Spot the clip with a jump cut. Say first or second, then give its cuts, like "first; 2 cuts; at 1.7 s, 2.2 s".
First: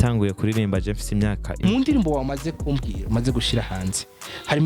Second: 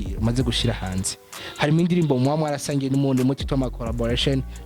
first; 1 cut; at 1.6 s